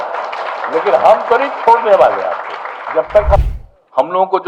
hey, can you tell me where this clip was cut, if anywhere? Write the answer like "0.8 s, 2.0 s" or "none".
3.4 s